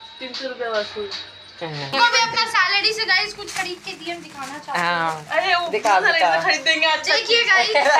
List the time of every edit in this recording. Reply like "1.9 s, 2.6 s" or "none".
1.9 s